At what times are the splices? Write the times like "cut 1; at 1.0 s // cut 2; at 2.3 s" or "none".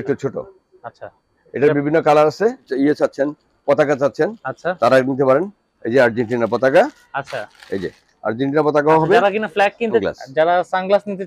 cut 1; at 2.7 s // cut 2; at 10.0 s